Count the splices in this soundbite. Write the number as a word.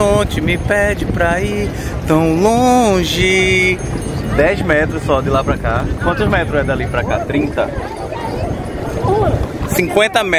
zero